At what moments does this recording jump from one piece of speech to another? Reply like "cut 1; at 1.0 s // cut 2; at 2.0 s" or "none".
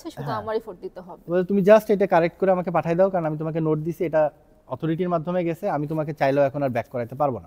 none